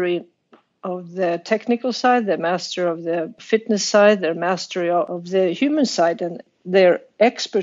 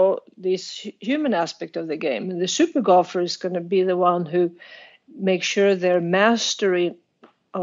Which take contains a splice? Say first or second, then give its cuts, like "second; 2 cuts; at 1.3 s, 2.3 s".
first; 3 cuts; at 3.4 s, 5.1 s, 6.5 s